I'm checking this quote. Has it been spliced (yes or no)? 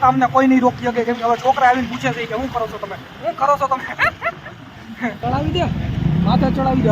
yes